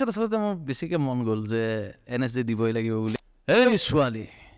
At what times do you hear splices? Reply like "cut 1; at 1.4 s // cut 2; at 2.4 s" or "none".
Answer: cut 1; at 3.3 s